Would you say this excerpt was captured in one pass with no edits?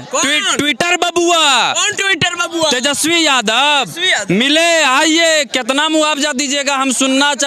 yes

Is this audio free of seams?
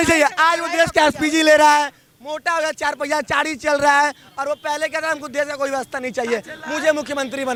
yes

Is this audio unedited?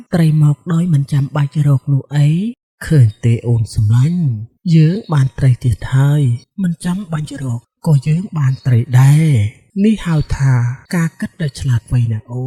yes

